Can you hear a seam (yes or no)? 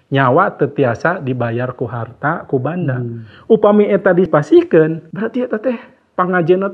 yes